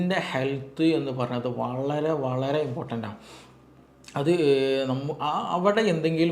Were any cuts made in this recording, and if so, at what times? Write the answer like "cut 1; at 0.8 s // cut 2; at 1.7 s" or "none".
none